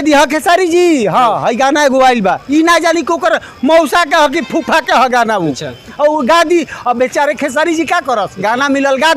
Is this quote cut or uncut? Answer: uncut